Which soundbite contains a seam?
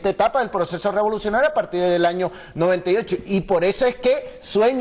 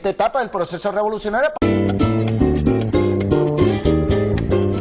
first; 1 cut; at 1.5 s

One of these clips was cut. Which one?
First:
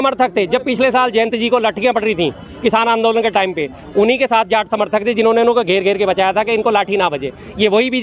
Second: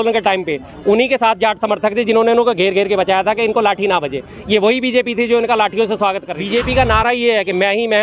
second; 1 cut; at 6.3 s

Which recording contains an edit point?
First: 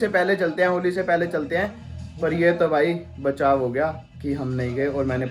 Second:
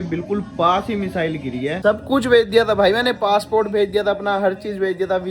second; 1 cut; at 1.8 s

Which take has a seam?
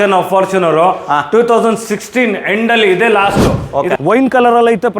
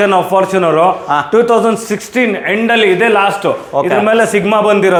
first; 1 cut; at 3.9 s

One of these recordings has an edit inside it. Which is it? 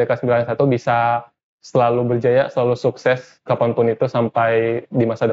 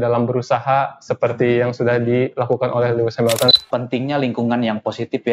second; 1 cut; at 3.5 s

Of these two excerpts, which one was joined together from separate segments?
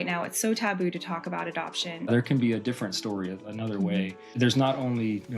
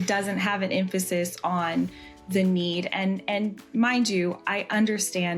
first; 2 cuts; at 2.0 s, 4.3 s

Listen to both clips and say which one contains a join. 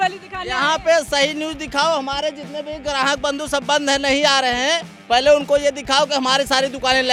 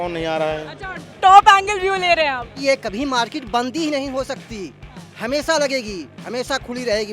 second; 1 cut; at 2.6 s

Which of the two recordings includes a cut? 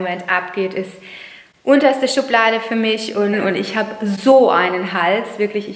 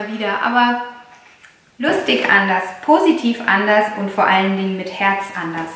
first; 1 cut; at 3.3 s

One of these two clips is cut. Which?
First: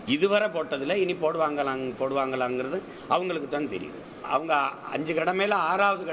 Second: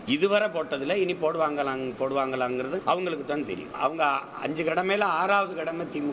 second; 2 cuts; at 2.8 s, 3.7 s

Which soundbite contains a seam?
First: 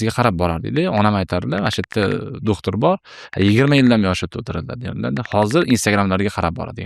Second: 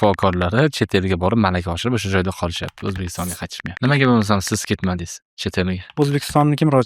second; 2 cuts; at 3.7 s, 5.9 s

